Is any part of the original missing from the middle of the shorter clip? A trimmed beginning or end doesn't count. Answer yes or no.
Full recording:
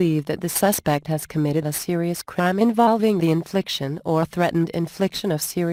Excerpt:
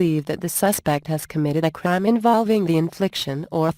yes